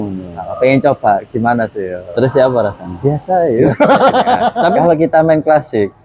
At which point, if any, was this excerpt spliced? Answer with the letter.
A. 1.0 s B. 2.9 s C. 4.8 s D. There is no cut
C